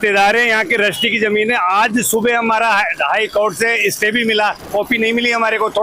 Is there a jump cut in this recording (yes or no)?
yes